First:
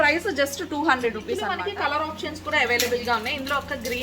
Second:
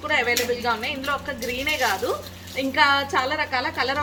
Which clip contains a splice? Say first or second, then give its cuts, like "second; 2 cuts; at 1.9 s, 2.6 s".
first; 1 cut; at 1.5 s